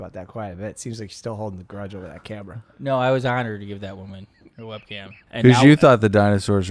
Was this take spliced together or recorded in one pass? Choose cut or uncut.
cut